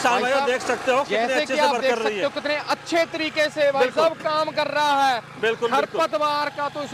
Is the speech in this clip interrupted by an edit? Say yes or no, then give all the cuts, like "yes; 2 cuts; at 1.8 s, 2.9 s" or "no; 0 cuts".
no; 0 cuts